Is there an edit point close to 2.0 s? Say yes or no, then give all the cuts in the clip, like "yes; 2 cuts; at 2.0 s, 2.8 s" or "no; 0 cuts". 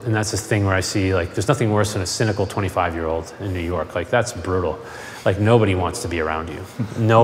yes; 1 cut; at 2.0 s